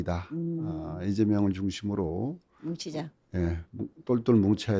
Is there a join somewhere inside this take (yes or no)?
no